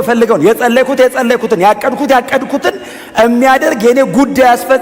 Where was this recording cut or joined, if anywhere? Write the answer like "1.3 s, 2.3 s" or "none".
none